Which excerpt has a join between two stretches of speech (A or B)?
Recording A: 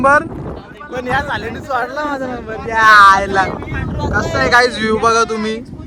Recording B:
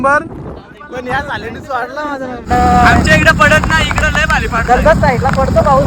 B